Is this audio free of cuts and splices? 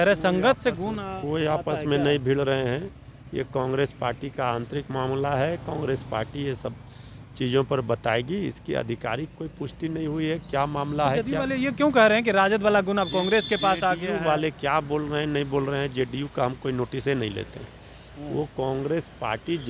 yes; 0 cuts

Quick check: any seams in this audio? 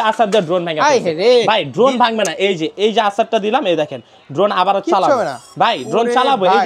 no; 0 cuts

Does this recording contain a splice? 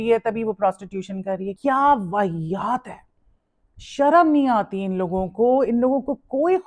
yes; 1 cut; at 1.5 s

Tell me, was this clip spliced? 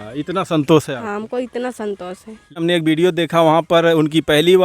yes; 1 cut; at 2.6 s

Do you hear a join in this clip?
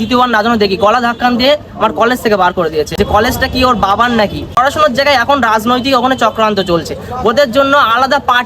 yes; 2 cuts; at 2.9 s, 4.6 s

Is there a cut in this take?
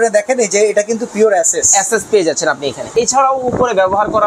yes; 1 cut; at 2.9 s

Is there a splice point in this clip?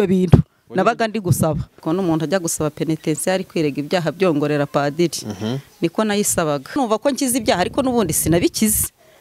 yes; 2 cuts; at 1.8 s, 6.8 s

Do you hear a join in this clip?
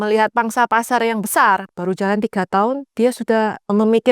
yes; 1 cut; at 1.7 s

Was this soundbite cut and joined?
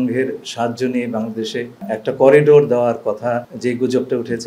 yes; 2 cuts; at 1.8 s, 3.5 s

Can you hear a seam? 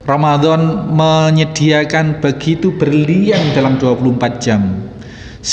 no; 0 cuts

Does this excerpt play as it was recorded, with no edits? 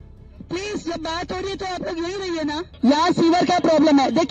no; 1 cut; at 2.7 s

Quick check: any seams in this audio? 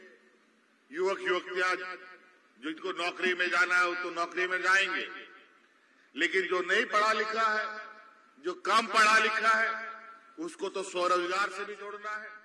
no; 0 cuts

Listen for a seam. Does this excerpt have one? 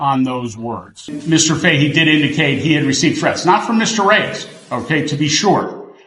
yes; 1 cut; at 1.1 s

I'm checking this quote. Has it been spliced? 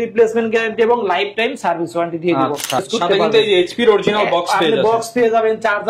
yes; 1 cut; at 2.9 s

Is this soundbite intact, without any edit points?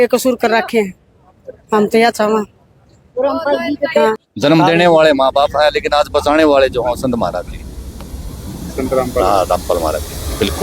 no; 1 cut; at 4.3 s

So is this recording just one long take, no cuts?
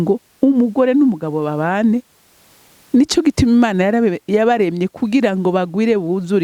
yes; 0 cuts

